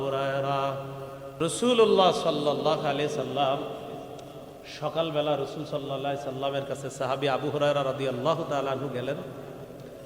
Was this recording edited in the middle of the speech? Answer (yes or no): yes